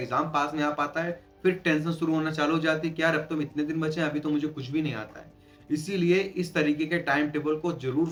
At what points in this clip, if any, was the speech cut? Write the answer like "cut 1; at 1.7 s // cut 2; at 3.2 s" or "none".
none